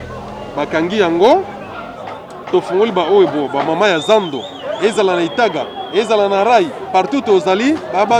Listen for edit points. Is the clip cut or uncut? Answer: uncut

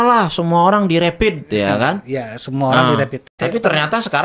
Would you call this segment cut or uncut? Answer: cut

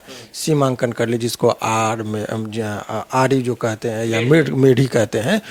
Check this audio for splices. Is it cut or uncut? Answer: uncut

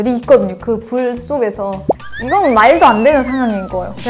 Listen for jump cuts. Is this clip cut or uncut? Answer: cut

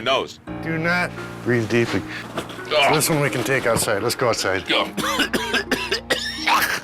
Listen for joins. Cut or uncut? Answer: cut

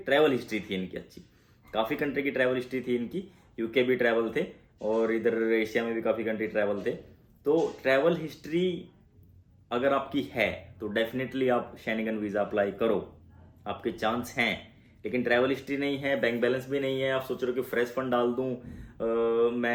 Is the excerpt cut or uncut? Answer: uncut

